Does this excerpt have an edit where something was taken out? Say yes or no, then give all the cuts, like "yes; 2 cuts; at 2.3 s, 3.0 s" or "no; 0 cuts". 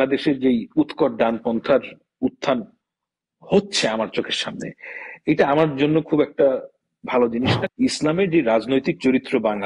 yes; 1 cut; at 7.6 s